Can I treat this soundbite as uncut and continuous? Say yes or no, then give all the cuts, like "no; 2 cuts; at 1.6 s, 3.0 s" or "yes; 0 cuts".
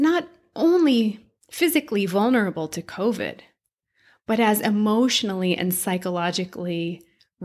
yes; 0 cuts